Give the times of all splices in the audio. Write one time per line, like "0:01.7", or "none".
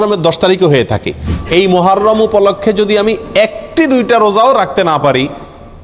0:01.3